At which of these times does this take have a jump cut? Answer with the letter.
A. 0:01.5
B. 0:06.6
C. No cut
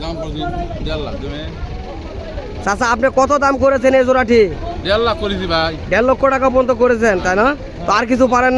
C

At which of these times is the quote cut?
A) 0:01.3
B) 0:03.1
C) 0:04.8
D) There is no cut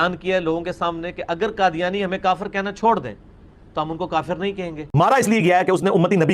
C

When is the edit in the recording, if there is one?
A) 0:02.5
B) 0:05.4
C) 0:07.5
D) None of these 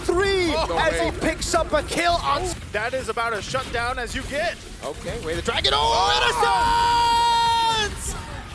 A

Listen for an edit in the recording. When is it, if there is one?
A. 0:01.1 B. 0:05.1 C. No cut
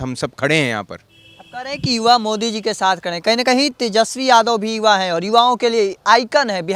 C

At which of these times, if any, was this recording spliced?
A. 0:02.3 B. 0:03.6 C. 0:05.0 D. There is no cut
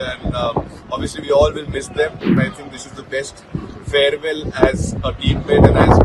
A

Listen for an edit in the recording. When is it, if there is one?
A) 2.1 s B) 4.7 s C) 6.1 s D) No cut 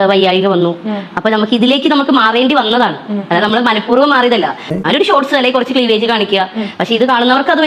B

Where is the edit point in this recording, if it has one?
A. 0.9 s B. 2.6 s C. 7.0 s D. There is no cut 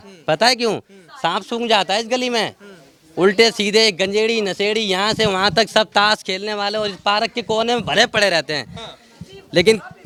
D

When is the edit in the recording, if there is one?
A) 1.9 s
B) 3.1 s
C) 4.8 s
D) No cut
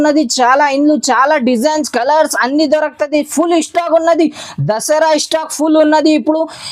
D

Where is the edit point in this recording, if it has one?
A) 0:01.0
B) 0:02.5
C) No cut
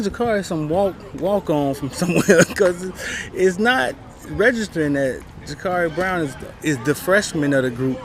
C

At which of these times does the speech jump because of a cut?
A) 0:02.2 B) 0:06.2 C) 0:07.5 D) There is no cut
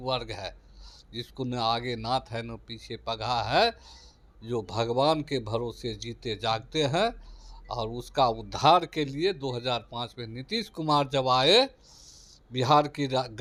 D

